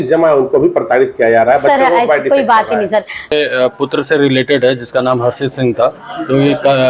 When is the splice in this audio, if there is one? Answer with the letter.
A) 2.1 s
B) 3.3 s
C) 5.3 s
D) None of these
B